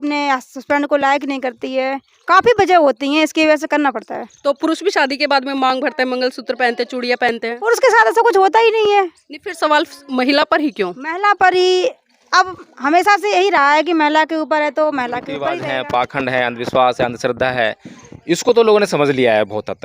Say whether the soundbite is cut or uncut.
cut